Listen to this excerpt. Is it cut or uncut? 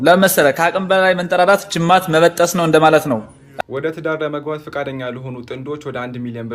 cut